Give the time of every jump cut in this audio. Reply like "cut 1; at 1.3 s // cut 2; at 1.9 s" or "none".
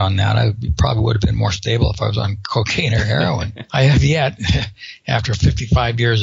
cut 1; at 3.5 s